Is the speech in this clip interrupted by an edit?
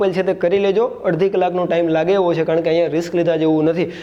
no; 0 cuts

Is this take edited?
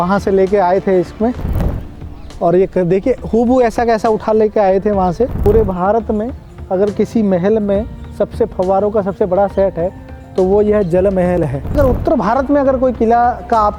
yes; 3 cuts; at 1.8 s, 5.3 s, 11.7 s

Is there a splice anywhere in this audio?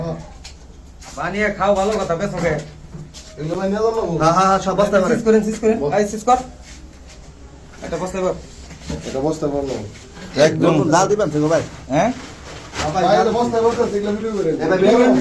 no; 0 cuts

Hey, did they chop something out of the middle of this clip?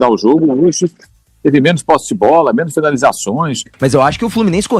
yes; 1 cut; at 3.7 s

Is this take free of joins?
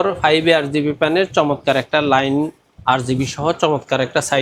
yes; 0 cuts

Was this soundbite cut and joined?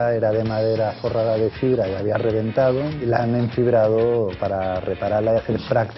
yes; 1 cut; at 3.0 s

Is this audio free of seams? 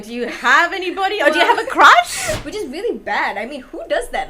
no; 1 cut; at 2.4 s

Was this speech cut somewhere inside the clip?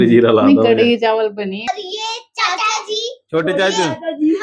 yes; 1 cut; at 1.6 s

